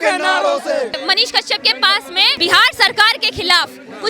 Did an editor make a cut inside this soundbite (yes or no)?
yes